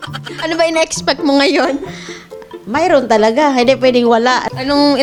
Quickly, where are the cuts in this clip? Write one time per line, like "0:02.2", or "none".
none